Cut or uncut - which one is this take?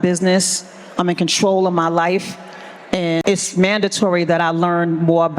cut